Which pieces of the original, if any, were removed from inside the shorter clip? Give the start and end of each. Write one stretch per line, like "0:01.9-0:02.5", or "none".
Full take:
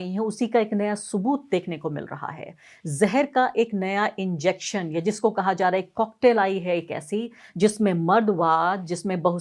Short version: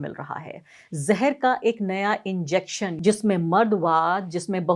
0:04.8-0:07.4